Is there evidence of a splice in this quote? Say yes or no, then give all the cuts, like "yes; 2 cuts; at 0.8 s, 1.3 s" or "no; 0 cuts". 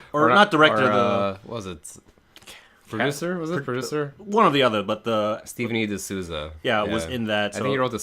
yes; 1 cut; at 1.0 s